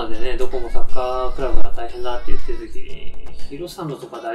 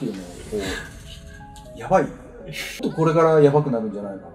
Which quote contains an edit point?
second; 1 cut; at 2.8 s

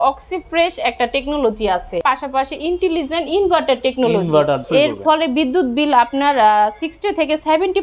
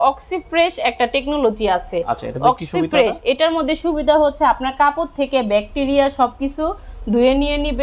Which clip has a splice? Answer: first; 2 cuts; at 2.0 s, 4.6 s

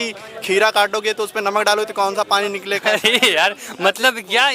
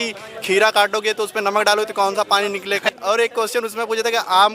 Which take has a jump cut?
second; 1 cut; at 2.9 s

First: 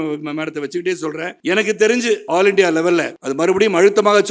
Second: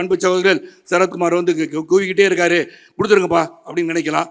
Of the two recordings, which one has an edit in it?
first; 3 cuts; at 1.3 s, 2.2 s, 3.2 s

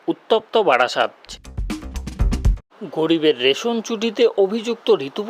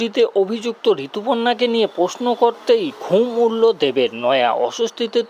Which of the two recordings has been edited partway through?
first; 2 cuts; at 1.2 s, 2.7 s

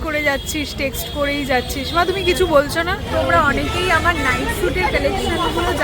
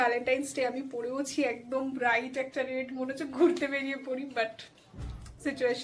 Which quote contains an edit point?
first; 1 cut; at 3.0 s

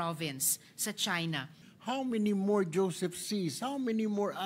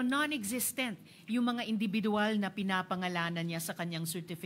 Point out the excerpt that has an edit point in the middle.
first; 1 cut; at 1.6 s

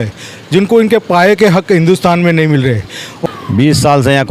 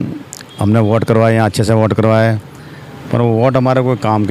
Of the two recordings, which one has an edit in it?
first; 1 cut; at 3.2 s

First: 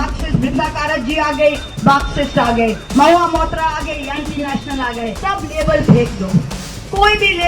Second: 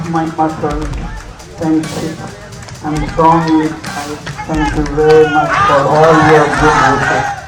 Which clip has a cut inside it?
first; 1 cut; at 5.2 s

